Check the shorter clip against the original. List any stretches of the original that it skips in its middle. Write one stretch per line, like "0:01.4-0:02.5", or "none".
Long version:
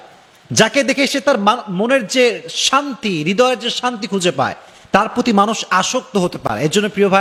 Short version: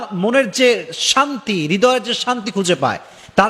none